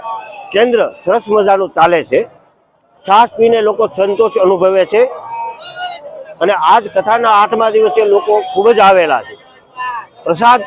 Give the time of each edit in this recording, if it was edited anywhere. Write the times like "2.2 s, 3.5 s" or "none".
none